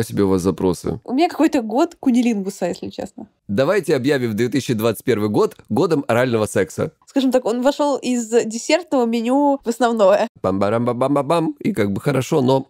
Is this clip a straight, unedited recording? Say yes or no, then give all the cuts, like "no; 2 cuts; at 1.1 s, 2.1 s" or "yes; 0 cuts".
no; 3 cuts; at 1.0 s, 6.9 s, 10.4 s